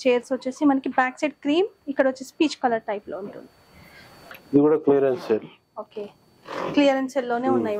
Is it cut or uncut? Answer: cut